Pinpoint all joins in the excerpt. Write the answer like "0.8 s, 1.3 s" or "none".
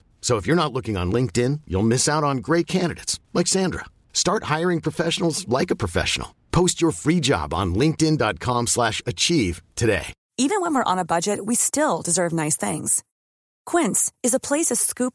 10.2 s